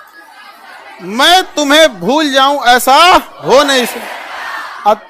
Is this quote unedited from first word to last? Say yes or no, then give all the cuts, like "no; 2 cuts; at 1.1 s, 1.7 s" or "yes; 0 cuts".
yes; 0 cuts